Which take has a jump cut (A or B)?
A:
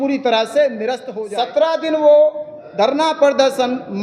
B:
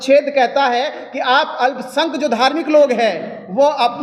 A